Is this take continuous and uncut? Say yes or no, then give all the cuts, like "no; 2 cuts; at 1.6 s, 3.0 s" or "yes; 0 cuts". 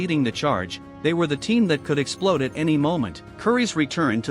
no; 1 cut; at 3.2 s